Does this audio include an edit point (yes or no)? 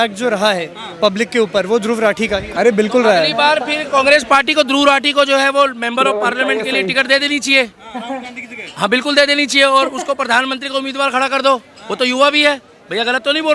yes